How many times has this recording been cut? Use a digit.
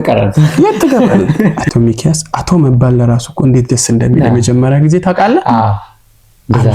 1